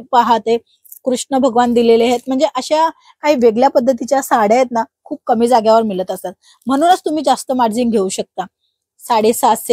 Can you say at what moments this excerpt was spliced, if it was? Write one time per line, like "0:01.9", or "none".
none